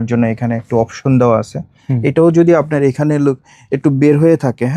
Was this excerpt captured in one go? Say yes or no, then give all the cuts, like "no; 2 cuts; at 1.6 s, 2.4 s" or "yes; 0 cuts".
yes; 0 cuts